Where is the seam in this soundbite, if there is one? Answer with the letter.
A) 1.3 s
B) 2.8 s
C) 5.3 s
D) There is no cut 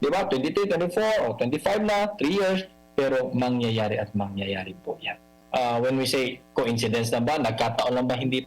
C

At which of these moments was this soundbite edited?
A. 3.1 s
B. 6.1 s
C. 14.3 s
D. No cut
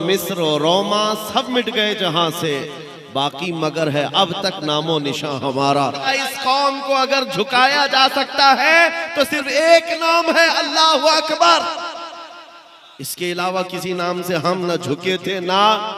B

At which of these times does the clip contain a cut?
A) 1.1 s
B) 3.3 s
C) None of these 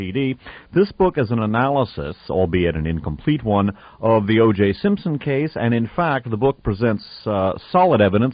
A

